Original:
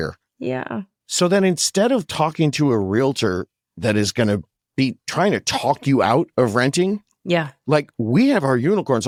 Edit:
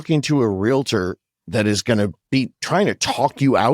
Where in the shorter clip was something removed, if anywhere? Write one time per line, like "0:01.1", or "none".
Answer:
0:02.2